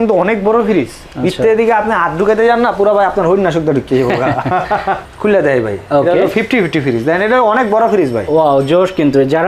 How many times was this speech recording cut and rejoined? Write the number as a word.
one